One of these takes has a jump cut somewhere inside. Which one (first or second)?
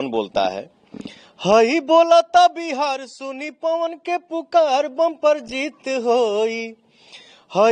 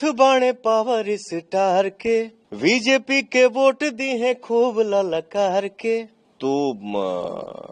second